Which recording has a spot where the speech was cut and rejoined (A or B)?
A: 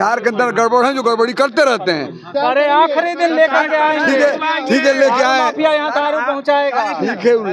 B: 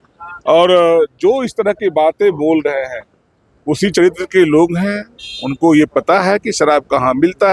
A